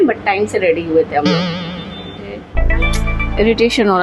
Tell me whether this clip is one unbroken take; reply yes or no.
no